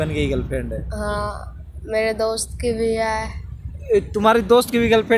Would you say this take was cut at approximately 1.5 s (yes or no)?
no